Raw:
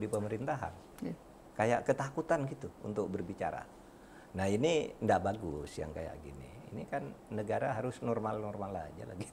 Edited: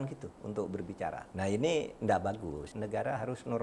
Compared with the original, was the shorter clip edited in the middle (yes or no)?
yes